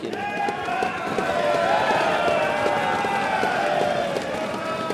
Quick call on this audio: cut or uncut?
uncut